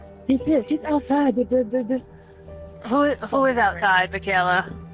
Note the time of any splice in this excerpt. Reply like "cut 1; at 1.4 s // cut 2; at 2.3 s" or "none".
none